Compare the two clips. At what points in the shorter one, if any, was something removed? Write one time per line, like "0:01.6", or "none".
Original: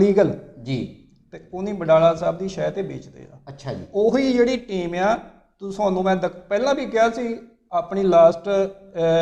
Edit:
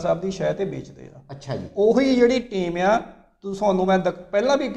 none